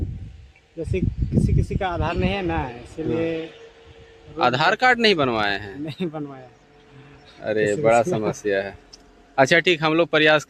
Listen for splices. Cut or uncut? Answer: uncut